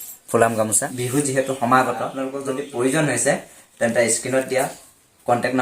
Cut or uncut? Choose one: cut